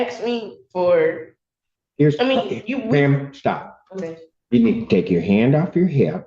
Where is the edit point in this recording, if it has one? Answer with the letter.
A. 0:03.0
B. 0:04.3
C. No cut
B